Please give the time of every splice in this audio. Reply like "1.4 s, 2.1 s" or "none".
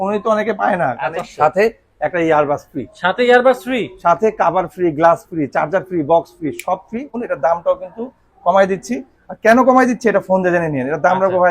1.1 s, 7.2 s

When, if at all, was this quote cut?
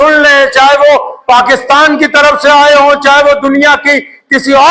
none

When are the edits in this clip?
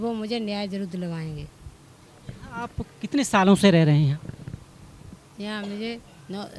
none

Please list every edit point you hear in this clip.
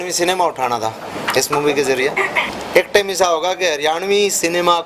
2.5 s

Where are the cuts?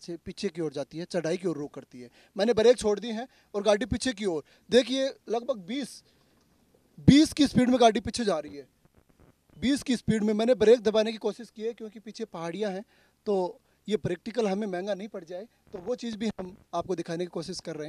none

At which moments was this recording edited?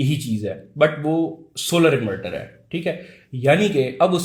none

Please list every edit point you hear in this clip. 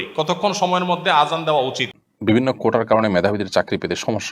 1.9 s

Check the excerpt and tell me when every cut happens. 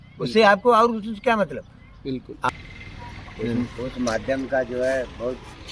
2.5 s

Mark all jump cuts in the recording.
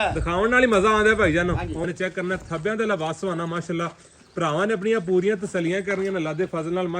1.8 s

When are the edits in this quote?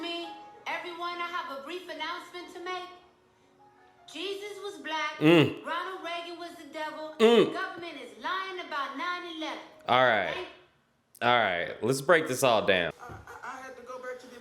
13.0 s

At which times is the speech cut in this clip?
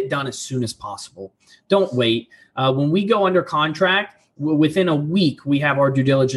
none

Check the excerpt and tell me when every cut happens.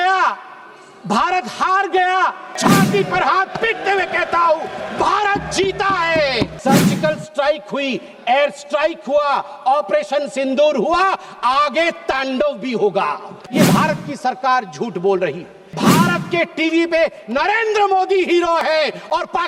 2.5 s, 6.6 s, 13.4 s, 15.6 s

